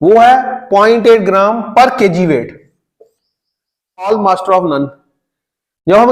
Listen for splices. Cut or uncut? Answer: cut